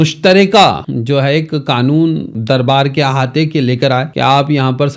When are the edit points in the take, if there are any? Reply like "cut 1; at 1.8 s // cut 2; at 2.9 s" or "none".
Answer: cut 1; at 0.9 s // cut 2; at 2.3 s // cut 3; at 4.1 s